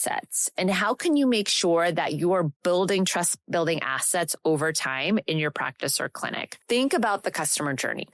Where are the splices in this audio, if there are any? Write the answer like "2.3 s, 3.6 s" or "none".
6.5 s